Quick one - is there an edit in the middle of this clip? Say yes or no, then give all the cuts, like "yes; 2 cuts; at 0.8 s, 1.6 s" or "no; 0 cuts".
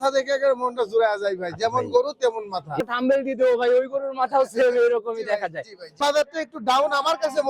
yes; 2 cuts; at 2.8 s, 6.0 s